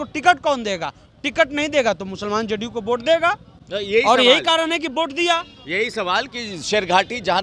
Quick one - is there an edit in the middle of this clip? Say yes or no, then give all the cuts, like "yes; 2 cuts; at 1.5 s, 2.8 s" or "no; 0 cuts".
no; 0 cuts